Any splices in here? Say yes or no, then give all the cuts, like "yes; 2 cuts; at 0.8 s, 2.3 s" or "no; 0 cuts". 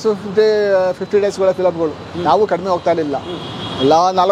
no; 0 cuts